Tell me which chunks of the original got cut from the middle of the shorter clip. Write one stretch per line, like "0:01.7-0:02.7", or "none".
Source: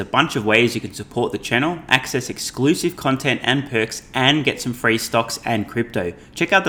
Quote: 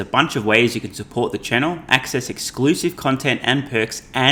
none